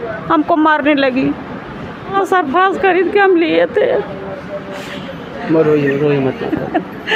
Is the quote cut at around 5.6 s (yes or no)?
no